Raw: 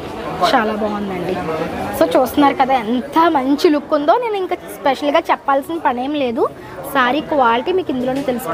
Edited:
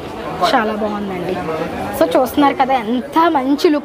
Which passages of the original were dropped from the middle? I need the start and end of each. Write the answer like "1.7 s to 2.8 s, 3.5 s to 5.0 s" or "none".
none